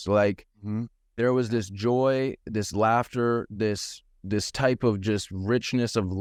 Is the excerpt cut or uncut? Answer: uncut